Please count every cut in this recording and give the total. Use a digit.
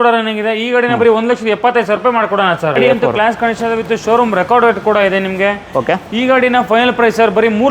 1